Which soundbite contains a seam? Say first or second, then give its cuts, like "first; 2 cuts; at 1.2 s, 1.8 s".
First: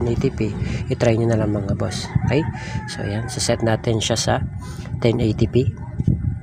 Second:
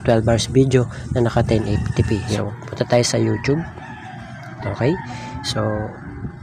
second; 1 cut; at 2.4 s